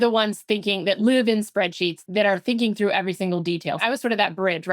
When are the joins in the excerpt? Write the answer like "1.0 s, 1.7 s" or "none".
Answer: 1.0 s, 2.0 s, 3.8 s

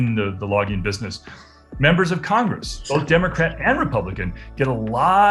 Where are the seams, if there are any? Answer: none

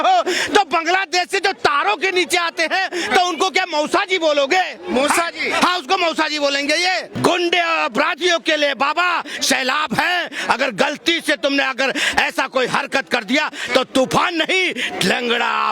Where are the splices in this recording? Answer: 7.1 s

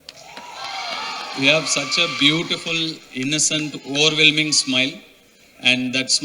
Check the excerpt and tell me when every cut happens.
none

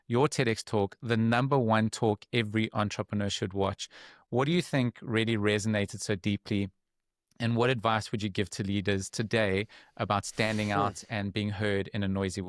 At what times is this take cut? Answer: none

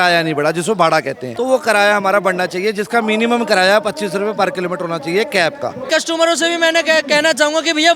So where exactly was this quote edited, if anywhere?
1.2 s, 5.9 s

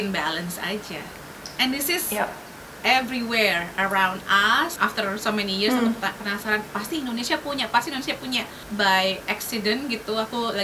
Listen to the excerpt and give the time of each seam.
4.8 s, 8.6 s

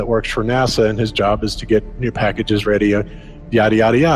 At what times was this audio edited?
3.0 s

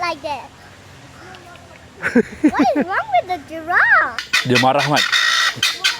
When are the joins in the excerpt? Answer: 4.3 s

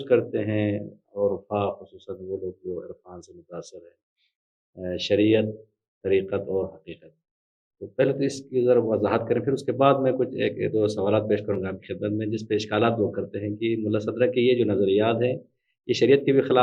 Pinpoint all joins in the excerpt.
none

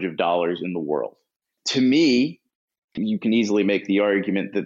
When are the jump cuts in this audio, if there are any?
1.5 s, 2.9 s

